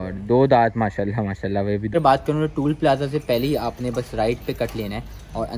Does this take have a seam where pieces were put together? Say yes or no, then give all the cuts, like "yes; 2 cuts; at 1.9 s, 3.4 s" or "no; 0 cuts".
yes; 1 cut; at 1.9 s